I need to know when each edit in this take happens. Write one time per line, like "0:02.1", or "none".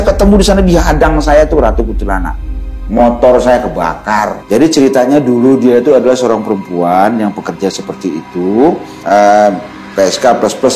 0:04.4
0:08.9